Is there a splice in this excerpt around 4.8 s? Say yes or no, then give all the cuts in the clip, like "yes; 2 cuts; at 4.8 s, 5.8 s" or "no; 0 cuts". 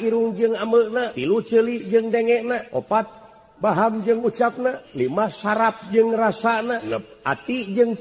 yes; 4 cuts; at 1.1 s, 2.7 s, 4.8 s, 6.9 s